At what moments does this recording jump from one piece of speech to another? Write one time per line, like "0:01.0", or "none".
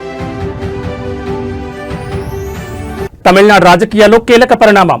0:02.7